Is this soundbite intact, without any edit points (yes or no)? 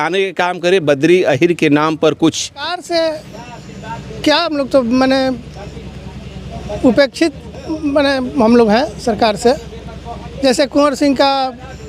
no